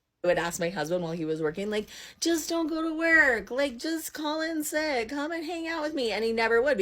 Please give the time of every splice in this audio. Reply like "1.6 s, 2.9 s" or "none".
1.4 s